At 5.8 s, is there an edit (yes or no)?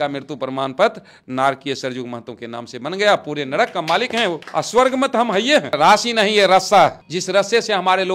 yes